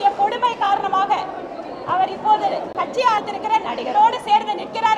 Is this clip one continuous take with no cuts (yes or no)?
no